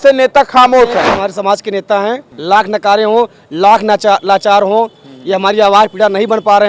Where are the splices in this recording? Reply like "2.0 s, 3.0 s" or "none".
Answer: 1.1 s, 2.3 s

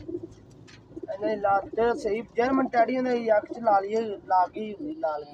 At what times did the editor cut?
none

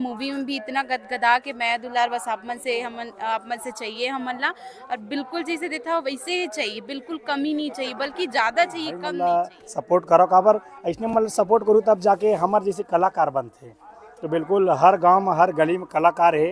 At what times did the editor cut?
9.1 s

